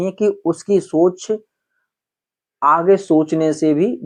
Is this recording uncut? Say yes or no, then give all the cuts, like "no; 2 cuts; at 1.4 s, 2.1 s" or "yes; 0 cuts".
yes; 0 cuts